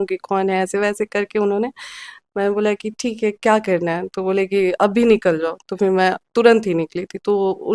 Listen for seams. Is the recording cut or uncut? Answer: uncut